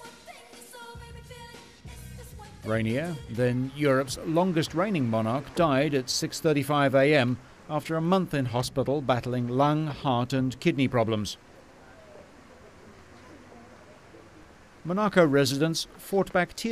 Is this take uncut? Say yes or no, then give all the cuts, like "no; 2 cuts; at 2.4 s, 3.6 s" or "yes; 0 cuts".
no; 1 cut; at 10.1 s